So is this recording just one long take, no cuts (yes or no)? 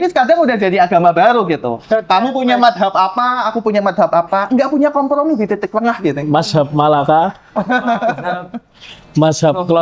yes